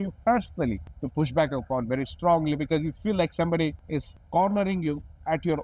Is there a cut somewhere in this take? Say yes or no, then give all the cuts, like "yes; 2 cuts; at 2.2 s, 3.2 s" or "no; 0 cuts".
yes; 2 cuts; at 0.9 s, 3.9 s